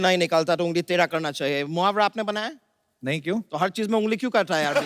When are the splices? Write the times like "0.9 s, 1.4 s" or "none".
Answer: none